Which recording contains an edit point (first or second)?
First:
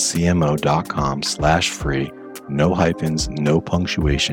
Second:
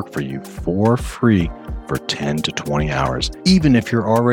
second